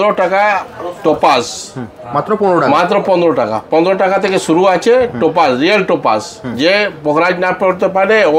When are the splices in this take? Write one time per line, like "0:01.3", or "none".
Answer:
none